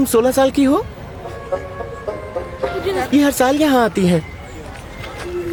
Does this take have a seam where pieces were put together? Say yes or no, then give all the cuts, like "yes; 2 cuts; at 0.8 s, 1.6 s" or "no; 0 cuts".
no; 0 cuts